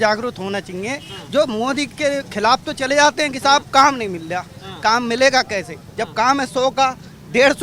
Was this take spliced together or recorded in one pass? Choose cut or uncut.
uncut